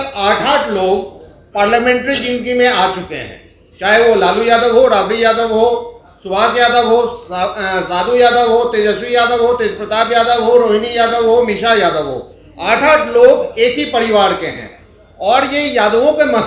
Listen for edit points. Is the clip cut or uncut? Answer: uncut